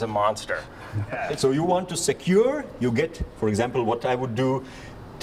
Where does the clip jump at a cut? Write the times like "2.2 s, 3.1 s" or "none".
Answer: 1.3 s